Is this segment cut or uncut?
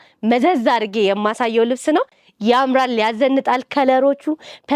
uncut